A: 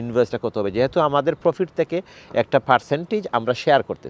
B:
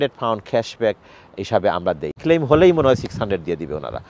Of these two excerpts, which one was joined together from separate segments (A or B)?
B